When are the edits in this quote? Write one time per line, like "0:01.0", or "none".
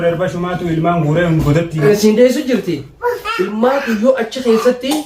0:01.8